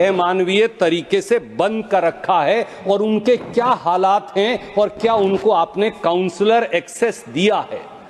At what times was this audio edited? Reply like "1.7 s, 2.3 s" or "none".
none